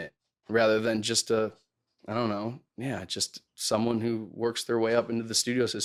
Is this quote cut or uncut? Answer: uncut